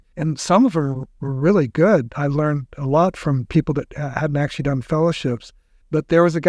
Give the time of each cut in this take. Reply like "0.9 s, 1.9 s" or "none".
none

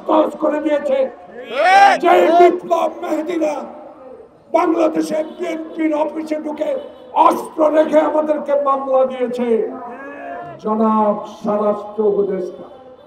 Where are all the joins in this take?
none

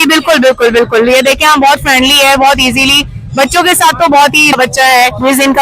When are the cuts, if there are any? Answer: 4.5 s

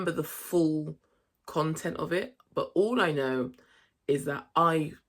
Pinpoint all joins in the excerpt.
none

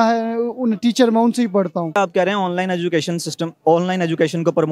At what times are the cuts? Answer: 2.0 s

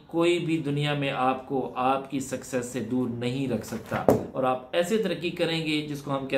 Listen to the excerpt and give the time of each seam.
none

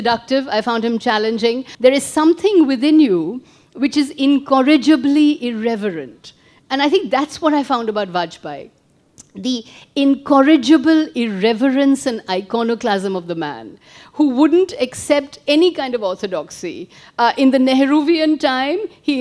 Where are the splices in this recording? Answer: 1.7 s

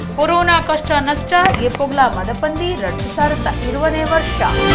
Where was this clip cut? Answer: none

